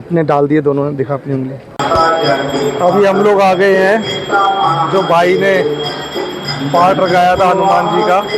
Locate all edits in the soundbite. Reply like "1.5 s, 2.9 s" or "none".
1.7 s

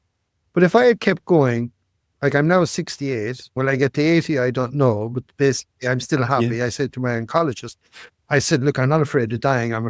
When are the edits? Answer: 3.5 s

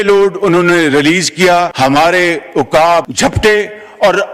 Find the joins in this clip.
1.7 s, 3.1 s

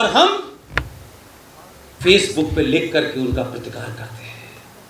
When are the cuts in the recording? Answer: none

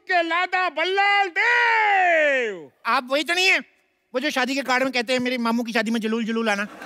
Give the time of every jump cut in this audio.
none

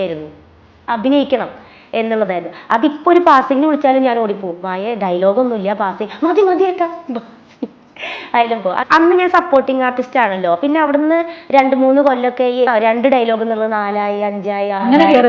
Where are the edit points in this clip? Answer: 8.8 s, 12.7 s

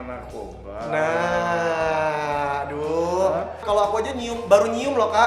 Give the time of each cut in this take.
3.6 s

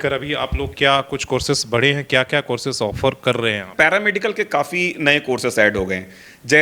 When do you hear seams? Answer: 3.7 s

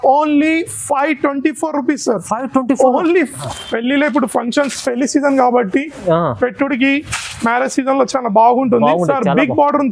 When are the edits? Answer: 3.4 s

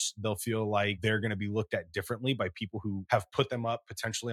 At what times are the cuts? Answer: 1.0 s, 3.0 s

